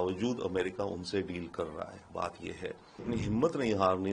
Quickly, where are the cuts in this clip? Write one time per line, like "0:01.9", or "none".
0:03.0